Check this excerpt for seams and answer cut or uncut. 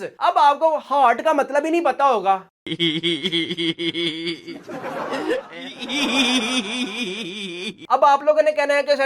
cut